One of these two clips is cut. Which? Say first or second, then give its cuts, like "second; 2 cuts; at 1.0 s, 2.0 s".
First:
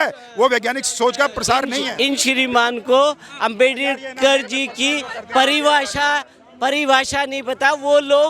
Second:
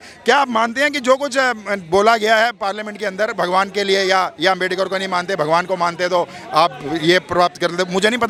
first; 1 cut; at 1.9 s